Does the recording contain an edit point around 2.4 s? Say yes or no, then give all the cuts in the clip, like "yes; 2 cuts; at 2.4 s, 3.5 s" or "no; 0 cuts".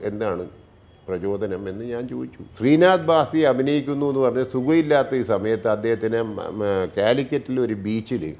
yes; 1 cut; at 2.4 s